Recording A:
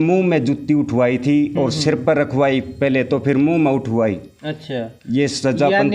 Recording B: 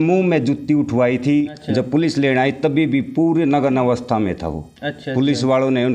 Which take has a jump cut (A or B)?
B